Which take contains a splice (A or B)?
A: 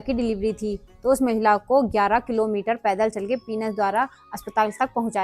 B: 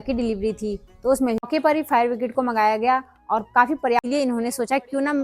B